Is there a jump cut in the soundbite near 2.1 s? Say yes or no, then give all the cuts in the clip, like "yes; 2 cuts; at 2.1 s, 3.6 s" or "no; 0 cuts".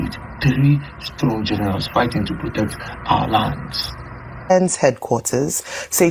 no; 1 cut; at 4.6 s